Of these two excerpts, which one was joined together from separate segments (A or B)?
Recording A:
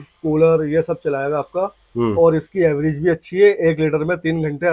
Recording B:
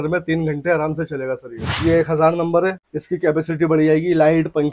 B